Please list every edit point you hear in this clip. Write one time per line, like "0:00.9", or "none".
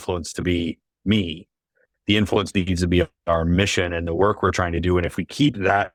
none